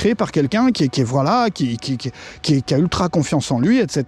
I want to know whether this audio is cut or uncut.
uncut